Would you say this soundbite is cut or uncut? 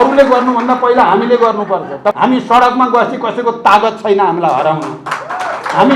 cut